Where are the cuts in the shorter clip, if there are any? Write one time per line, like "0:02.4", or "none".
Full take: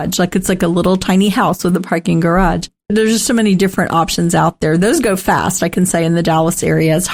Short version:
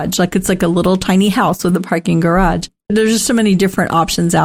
none